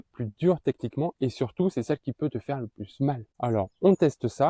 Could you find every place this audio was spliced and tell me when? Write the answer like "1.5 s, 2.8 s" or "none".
3.3 s